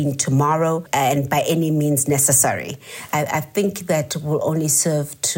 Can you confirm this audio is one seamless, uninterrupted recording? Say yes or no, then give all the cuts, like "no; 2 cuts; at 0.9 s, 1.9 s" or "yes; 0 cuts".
no; 2 cuts; at 0.9 s, 3.1 s